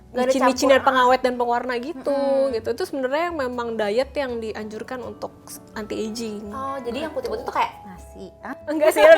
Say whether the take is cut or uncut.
uncut